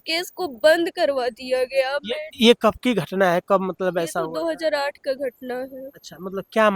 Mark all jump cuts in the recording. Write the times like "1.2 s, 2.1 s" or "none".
none